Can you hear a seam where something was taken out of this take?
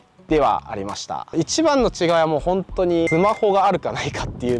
yes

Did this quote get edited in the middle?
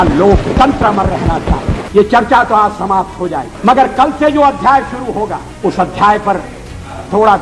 yes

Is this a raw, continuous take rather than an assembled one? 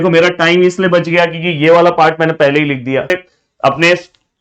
no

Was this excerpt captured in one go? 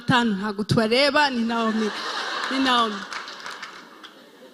yes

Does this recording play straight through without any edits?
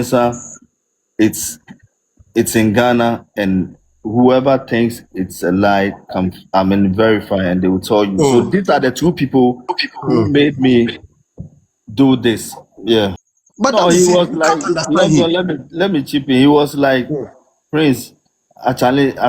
no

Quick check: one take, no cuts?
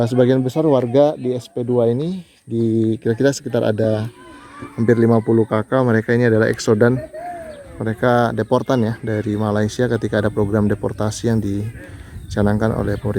yes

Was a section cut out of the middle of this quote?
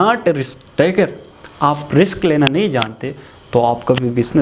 no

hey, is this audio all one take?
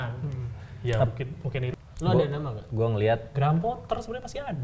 no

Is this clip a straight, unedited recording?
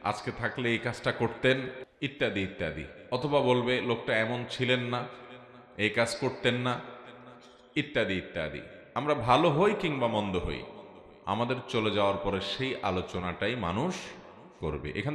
no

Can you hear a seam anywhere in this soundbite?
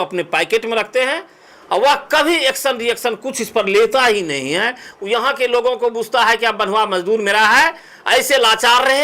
no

